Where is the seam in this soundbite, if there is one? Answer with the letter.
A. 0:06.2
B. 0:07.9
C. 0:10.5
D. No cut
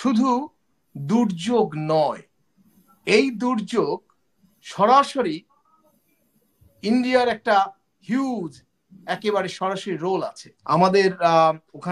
C